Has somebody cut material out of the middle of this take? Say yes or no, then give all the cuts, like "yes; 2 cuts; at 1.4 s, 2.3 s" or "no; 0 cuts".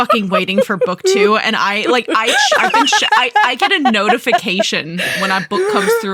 no; 0 cuts